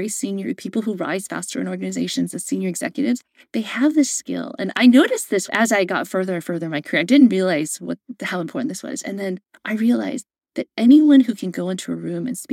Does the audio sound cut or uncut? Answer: uncut